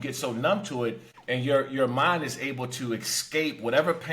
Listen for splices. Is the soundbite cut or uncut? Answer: cut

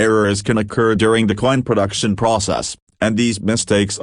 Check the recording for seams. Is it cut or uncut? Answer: uncut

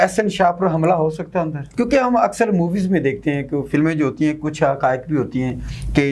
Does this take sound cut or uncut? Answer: cut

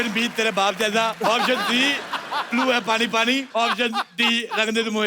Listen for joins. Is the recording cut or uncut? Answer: cut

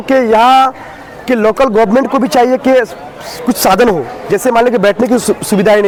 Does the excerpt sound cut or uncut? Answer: uncut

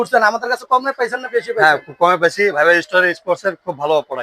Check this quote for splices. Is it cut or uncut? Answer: uncut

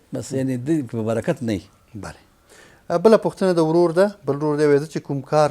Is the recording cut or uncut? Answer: uncut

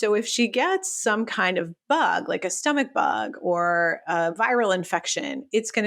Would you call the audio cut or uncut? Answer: uncut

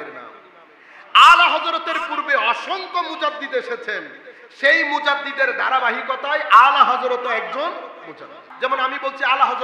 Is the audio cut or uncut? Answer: cut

